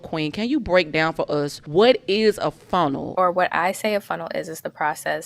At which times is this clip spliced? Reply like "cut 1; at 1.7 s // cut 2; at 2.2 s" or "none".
cut 1; at 1.6 s // cut 2; at 3.0 s

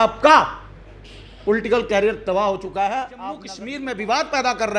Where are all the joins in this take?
cut 1; at 3.5 s

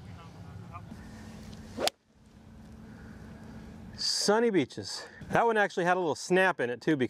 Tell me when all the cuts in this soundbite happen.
none

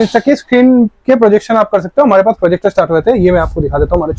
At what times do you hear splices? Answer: none

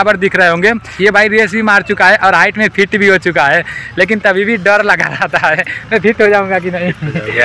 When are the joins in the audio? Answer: none

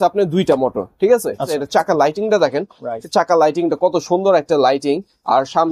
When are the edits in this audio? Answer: cut 1; at 1.6 s

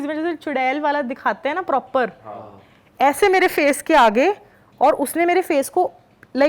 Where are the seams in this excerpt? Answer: none

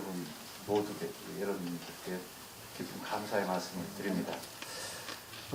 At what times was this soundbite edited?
none

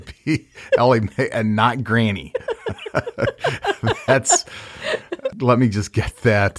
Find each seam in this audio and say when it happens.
cut 1; at 5.4 s

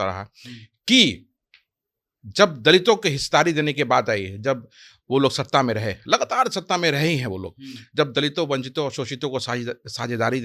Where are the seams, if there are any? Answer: none

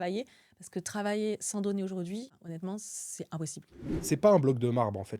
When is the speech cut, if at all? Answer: cut 1; at 2.4 s // cut 2; at 3.9 s

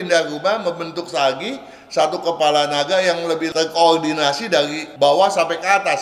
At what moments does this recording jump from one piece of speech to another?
cut 1; at 3.5 s // cut 2; at 4.8 s

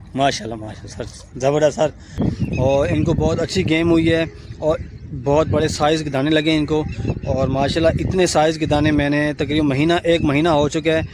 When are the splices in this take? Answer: cut 1; at 2.2 s

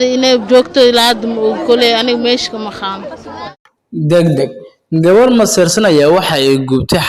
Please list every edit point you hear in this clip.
cut 1; at 3.4 s

